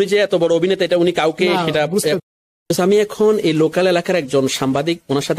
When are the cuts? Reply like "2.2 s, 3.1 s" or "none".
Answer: 2.2 s